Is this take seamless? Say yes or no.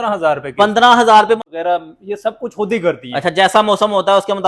no